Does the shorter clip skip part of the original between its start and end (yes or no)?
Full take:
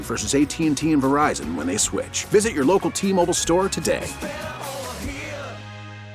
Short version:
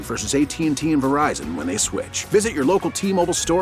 no